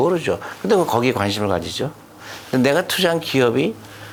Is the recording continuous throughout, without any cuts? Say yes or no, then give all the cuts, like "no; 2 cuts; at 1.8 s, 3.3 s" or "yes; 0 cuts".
yes; 0 cuts